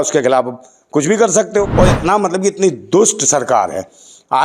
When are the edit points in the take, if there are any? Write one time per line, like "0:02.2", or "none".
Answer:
0:01.7